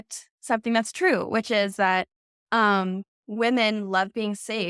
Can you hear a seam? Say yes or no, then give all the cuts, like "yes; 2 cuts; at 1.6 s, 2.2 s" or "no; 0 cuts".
no; 0 cuts